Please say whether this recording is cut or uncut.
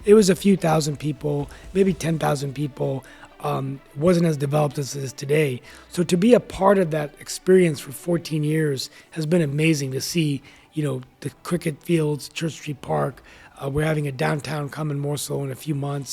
uncut